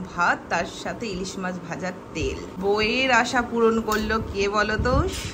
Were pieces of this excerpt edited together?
yes; 1 cut; at 2.6 s

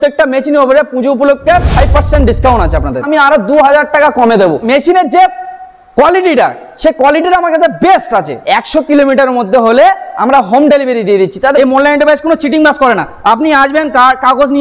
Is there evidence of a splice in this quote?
yes; 4 cuts; at 3.0 s, 4.7 s, 8.4 s, 11.6 s

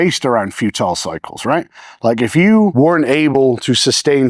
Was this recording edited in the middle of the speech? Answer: yes; 1 cut; at 2.7 s

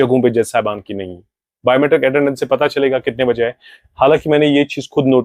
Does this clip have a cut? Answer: no; 0 cuts

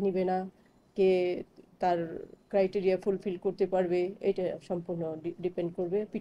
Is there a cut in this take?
no; 0 cuts

